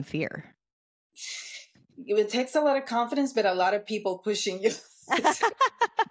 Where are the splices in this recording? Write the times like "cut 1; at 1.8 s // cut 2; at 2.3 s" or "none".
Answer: none